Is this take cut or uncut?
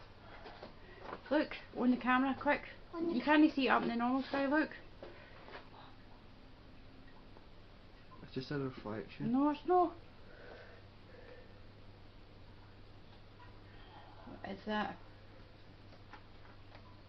cut